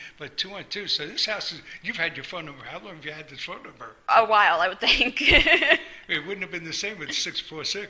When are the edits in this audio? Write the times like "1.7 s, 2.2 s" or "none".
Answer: 2.9 s